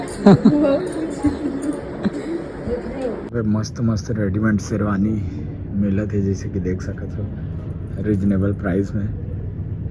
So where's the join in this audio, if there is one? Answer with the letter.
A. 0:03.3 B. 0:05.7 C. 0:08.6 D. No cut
A